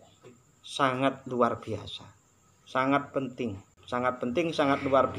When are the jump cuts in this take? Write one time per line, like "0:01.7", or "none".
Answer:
0:03.7